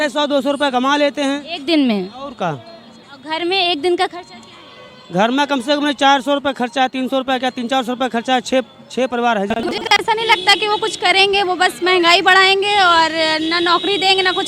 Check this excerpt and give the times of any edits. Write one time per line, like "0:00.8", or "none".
0:10.0